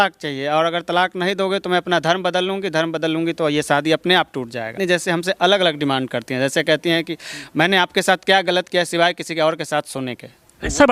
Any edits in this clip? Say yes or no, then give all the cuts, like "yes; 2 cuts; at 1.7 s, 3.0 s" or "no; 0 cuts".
yes; 1 cut; at 4.8 s